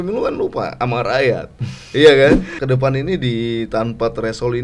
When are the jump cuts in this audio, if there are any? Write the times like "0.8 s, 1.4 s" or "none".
2.5 s